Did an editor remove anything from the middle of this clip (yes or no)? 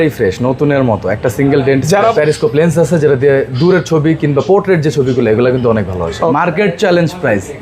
yes